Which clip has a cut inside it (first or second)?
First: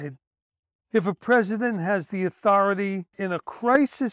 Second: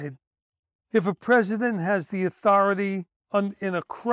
first